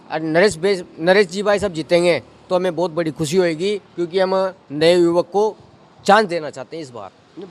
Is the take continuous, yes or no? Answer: yes